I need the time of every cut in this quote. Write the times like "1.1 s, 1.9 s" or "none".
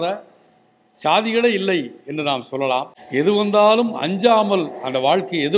3.0 s